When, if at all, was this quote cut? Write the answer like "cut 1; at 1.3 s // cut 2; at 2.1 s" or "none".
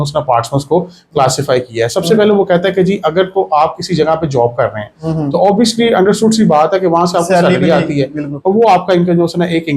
none